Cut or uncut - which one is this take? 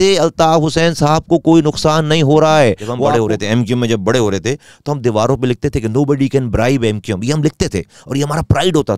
cut